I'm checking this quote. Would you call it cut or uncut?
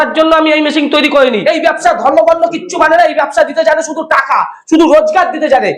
cut